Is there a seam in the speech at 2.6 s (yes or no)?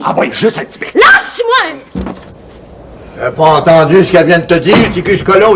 no